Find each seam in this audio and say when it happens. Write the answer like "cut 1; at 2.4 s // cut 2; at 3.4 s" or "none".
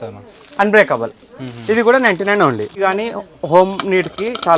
cut 1; at 2.8 s